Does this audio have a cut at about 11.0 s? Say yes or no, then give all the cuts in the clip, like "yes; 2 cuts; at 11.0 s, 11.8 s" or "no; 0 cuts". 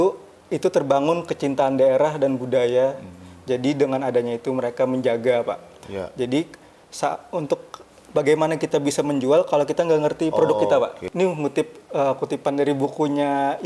yes; 1 cut; at 11.0 s